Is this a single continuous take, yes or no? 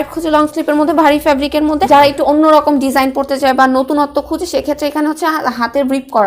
no